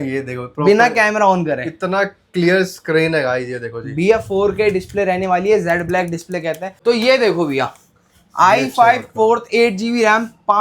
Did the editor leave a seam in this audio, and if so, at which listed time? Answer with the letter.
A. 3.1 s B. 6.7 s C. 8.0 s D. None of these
B